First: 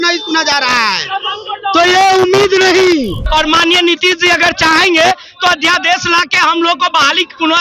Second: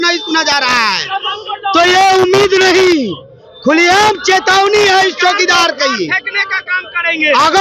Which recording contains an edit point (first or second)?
first